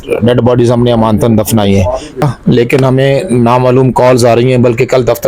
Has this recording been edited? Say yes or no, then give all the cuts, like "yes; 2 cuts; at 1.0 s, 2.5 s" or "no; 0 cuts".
yes; 1 cut; at 2.2 s